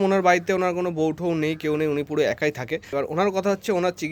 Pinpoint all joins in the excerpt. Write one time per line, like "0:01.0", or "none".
0:02.9